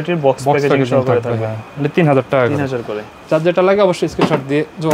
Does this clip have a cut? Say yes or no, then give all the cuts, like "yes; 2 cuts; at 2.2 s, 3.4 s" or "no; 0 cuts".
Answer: no; 0 cuts